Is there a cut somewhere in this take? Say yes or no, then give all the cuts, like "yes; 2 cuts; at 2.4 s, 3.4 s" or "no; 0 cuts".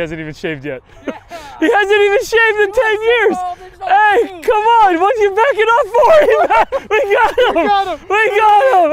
no; 0 cuts